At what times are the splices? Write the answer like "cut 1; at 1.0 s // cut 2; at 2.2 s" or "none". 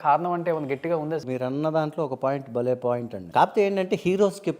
cut 1; at 1.2 s // cut 2; at 3.1 s